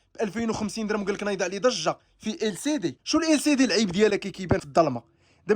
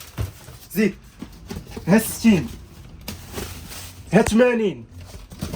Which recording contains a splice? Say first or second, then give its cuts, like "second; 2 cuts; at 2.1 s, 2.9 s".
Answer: first; 2 cuts; at 3.0 s, 4.6 s